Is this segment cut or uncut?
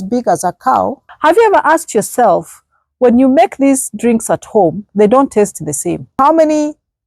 cut